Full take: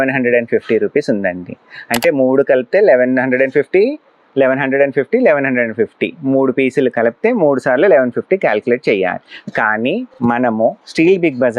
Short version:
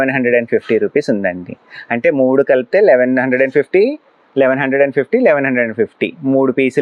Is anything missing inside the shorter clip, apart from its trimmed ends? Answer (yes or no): no